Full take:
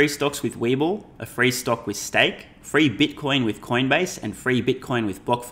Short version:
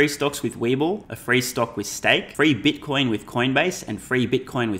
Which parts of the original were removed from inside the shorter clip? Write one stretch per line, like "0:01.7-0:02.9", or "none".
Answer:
0:01.1-0:01.2
0:02.4-0:02.6